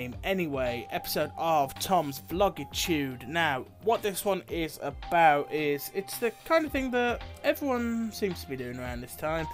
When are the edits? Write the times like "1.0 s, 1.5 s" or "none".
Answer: none